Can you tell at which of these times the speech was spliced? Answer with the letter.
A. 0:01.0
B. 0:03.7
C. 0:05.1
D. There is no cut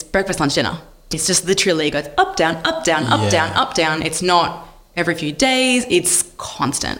D